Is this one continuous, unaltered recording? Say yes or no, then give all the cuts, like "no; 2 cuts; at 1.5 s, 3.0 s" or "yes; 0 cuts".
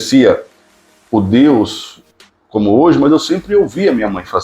yes; 0 cuts